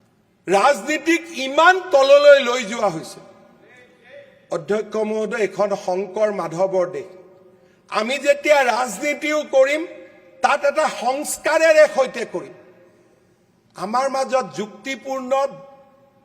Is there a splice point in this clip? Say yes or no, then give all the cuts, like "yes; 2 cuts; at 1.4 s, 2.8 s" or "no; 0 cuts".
no; 0 cuts